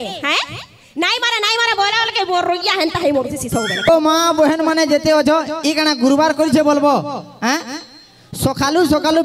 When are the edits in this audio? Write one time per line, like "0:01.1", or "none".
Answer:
0:03.9